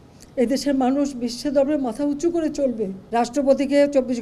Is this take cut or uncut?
cut